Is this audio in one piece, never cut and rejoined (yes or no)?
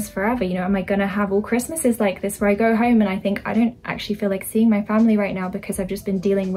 yes